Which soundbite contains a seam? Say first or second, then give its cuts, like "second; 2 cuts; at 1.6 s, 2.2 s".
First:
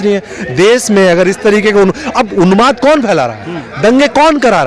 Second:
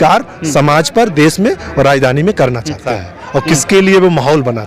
second; 1 cut; at 2.9 s